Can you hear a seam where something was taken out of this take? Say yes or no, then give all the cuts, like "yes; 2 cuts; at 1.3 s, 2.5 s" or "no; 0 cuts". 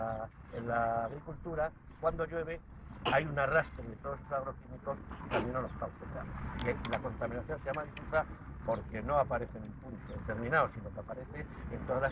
yes; 1 cut; at 8.6 s